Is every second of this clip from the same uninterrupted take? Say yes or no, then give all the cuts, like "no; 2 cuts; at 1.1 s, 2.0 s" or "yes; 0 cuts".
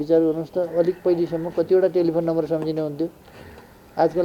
yes; 0 cuts